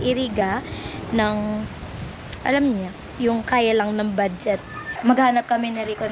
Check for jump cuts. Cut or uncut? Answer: cut